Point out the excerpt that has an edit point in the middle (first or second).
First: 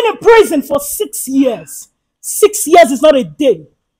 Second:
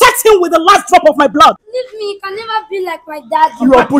second